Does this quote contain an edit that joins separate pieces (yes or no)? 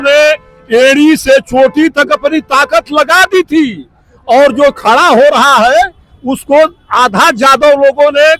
no